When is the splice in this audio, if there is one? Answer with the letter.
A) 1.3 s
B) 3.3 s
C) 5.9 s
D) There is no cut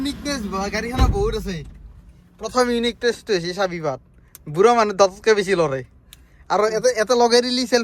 D